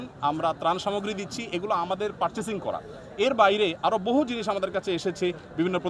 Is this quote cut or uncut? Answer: uncut